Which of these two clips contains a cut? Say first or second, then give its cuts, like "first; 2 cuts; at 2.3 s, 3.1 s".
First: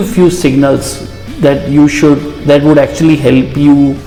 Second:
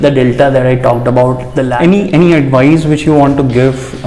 second; 1 cut; at 1.7 s